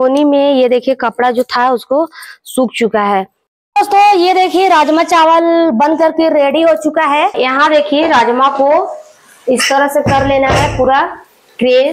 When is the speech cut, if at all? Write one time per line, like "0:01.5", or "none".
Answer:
0:03.4
0:07.3